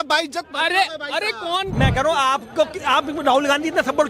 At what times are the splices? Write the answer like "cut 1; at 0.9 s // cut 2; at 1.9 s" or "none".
cut 1; at 1.7 s